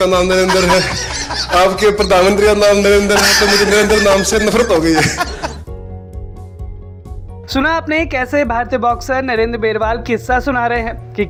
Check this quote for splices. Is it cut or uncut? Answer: uncut